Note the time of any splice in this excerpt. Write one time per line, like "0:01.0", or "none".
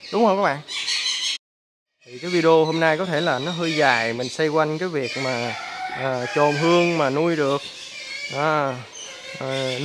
0:01.6